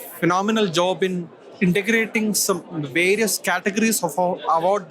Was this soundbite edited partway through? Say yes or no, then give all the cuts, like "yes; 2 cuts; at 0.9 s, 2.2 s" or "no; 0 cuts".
no; 0 cuts